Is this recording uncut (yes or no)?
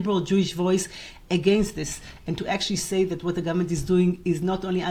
yes